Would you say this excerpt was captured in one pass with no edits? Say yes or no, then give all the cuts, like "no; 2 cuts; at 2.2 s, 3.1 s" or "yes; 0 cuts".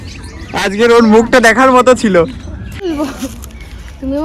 no; 1 cut; at 2.8 s